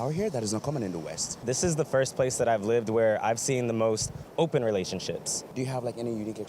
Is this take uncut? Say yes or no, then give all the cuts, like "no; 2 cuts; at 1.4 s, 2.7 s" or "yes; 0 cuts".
no; 2 cuts; at 1.4 s, 5.5 s